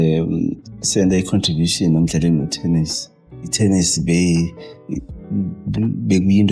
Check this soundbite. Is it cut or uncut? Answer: cut